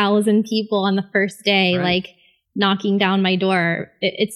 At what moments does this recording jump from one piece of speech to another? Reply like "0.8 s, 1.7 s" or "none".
none